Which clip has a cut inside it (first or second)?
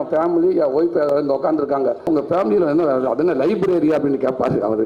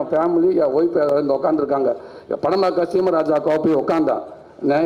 first